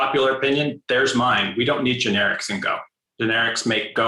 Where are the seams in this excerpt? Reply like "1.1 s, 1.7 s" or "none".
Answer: 3.0 s